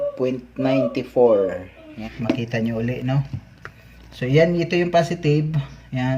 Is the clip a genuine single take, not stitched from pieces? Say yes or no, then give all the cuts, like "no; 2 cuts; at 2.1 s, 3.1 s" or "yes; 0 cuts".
no; 1 cut; at 1.9 s